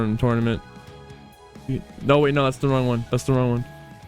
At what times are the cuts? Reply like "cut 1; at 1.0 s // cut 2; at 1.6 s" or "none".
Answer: cut 1; at 3.0 s